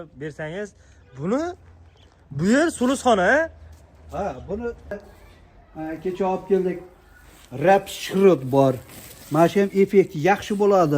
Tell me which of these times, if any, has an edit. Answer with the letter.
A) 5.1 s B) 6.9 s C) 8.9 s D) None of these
A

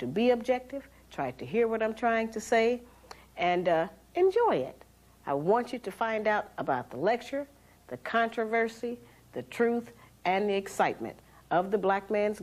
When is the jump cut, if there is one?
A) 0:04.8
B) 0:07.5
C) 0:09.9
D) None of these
C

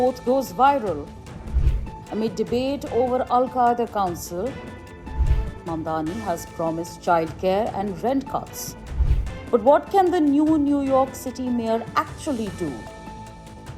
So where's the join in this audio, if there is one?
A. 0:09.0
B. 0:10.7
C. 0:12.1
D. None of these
B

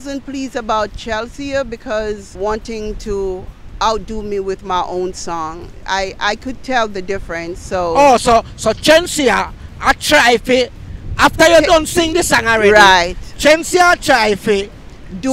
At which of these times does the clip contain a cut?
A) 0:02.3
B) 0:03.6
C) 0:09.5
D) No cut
A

